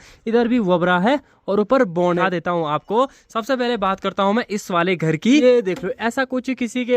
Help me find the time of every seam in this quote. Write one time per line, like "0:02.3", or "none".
0:02.2
0:05.4